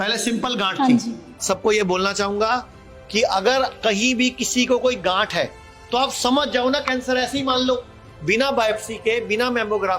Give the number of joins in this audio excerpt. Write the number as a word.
one